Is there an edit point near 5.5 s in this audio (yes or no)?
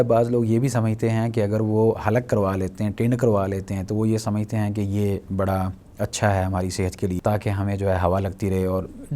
no